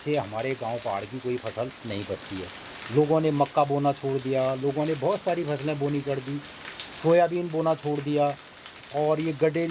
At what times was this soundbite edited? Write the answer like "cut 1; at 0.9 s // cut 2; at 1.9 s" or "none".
none